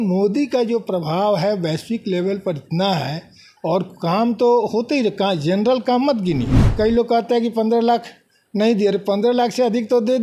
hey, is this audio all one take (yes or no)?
no